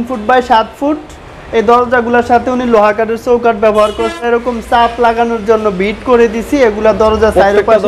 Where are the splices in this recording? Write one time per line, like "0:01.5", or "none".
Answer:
0:04.2